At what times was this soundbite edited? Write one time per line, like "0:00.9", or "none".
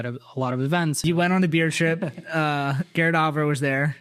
0:01.0